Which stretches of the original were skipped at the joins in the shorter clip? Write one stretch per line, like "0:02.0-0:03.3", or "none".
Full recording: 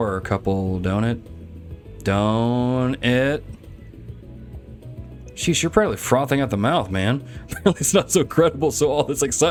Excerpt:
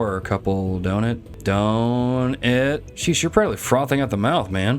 0:01.3-0:01.9
0:03.5-0:05.3